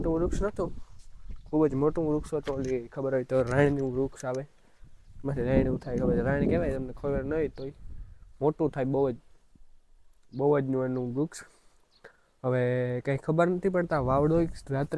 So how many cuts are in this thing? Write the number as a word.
zero